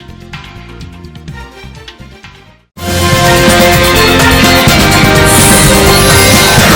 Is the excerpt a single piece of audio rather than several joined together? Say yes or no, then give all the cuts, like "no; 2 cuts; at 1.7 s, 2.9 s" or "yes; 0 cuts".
yes; 0 cuts